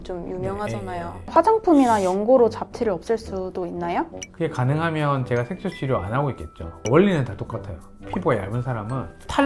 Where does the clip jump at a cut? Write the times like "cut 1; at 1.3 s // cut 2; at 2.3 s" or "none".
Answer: cut 1; at 1.2 s // cut 2; at 8.0 s